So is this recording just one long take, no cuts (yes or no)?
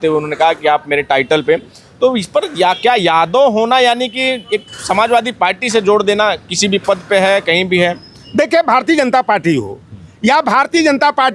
yes